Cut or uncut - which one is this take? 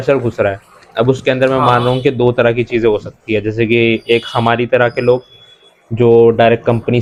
uncut